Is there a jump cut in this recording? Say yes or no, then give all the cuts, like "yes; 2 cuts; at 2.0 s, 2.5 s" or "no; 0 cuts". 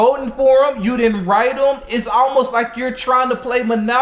no; 0 cuts